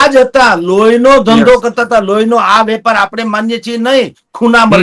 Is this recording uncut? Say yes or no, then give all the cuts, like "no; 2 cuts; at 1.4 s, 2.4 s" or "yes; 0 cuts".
yes; 0 cuts